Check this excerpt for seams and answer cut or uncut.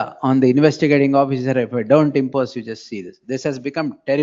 uncut